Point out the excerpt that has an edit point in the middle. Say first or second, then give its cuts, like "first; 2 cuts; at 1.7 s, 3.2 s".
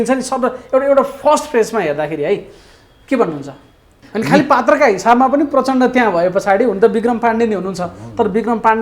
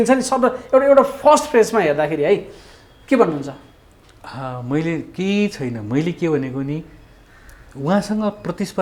first; 1 cut; at 4.0 s